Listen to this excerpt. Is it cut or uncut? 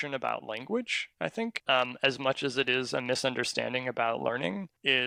uncut